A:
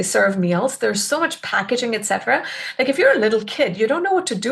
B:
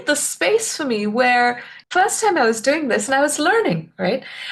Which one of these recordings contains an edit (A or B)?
B